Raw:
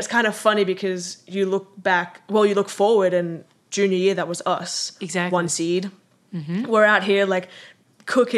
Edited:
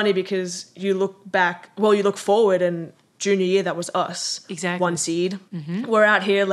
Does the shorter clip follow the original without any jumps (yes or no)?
no